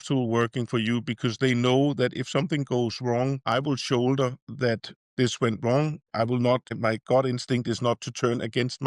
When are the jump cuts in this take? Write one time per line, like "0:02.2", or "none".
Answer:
none